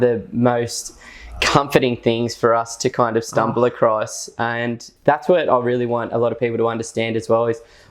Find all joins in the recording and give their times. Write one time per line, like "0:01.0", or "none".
0:04.8